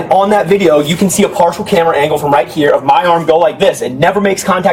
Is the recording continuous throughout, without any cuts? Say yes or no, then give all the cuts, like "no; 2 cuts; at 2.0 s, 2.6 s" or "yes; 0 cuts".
yes; 0 cuts